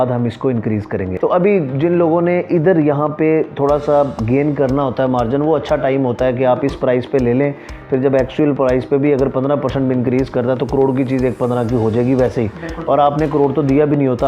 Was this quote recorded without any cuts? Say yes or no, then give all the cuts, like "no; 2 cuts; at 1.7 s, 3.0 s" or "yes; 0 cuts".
no; 1 cut; at 1.1 s